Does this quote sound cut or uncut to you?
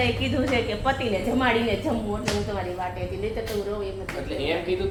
uncut